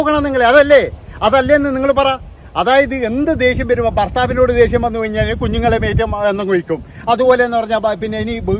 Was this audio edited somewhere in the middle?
no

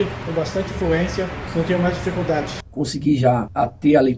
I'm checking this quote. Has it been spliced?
yes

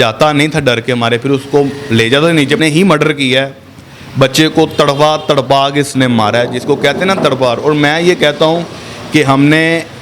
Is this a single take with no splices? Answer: no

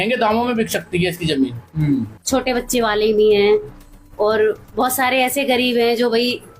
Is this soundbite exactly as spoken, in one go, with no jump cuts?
no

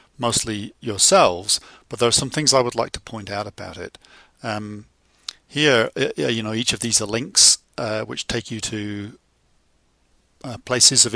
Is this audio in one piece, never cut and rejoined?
yes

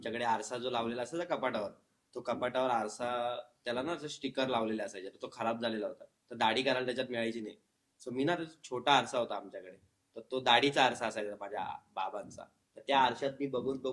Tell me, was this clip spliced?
no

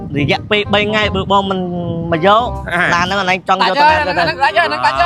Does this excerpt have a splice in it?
no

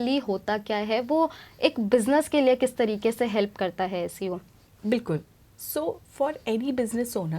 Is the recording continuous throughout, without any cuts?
yes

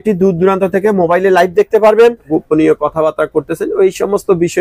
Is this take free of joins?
no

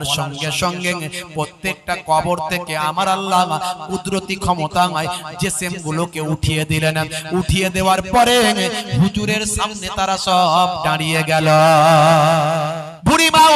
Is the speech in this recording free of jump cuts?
no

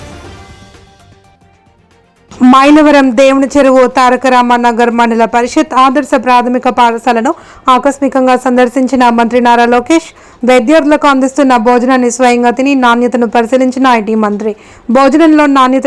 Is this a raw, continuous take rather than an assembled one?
no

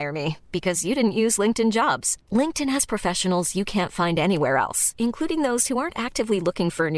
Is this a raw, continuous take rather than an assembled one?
yes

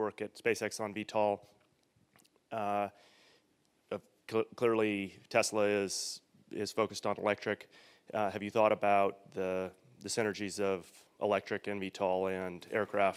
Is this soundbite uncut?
yes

